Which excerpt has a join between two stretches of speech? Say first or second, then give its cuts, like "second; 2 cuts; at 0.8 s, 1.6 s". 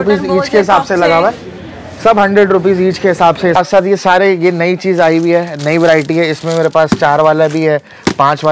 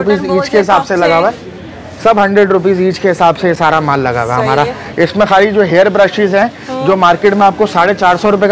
first; 1 cut; at 3.6 s